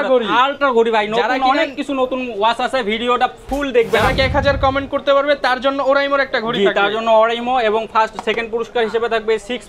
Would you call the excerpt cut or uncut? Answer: cut